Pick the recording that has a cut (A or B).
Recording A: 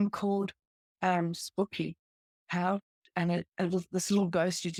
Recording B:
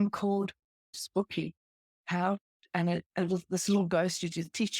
B